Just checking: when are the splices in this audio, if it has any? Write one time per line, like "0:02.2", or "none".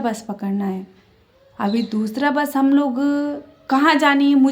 none